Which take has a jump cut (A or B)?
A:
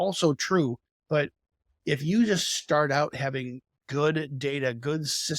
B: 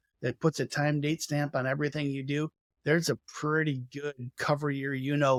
A